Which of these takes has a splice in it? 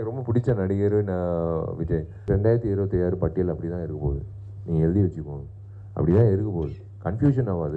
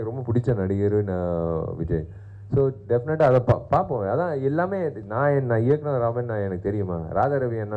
first; 1 cut; at 2.3 s

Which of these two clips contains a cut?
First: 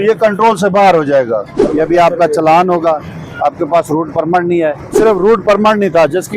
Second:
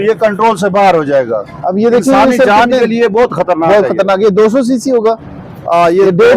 first; 2 cuts; at 1.5 s, 4.9 s

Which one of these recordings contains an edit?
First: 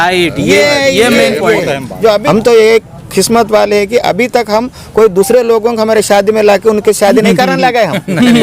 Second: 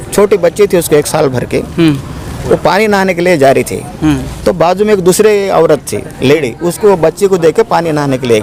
first; 1 cut; at 2.2 s

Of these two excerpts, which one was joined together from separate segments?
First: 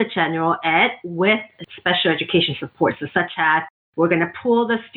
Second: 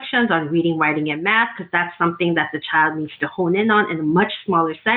first; 1 cut; at 1.6 s

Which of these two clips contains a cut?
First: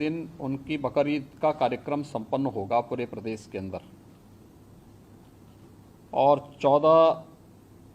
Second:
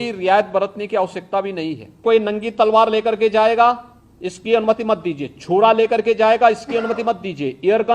second; 1 cut; at 2.0 s

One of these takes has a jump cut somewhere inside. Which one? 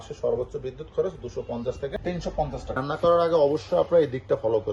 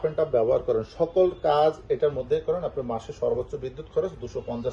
first; 1 cut; at 2.7 s

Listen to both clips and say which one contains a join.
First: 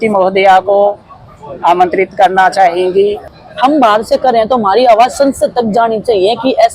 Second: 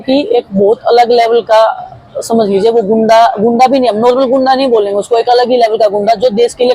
first; 1 cut; at 3.3 s

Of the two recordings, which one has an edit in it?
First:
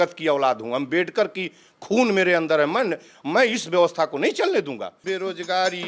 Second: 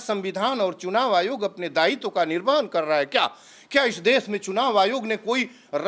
first; 1 cut; at 4.9 s

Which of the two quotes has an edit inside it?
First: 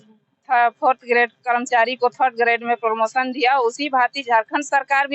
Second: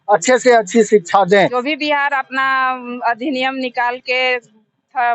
second; 1 cut; at 1.6 s

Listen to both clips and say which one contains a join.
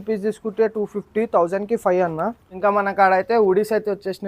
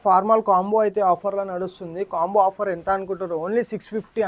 first; 1 cut; at 2.4 s

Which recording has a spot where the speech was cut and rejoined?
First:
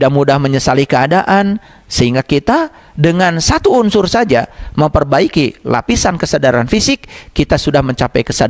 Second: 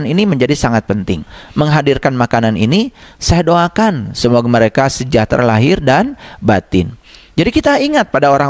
second; 1 cut; at 1.4 s

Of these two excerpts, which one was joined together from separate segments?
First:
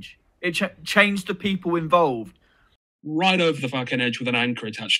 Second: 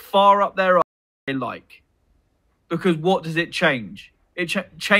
first; 1 cut; at 2.7 s

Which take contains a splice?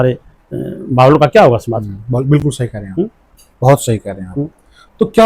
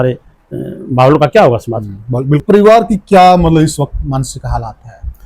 second; 1 cut; at 2.4 s

